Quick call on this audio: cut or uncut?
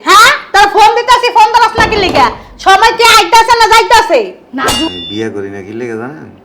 cut